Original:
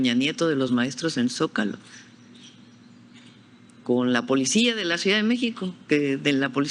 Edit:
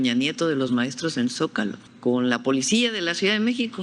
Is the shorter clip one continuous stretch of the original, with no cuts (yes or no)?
no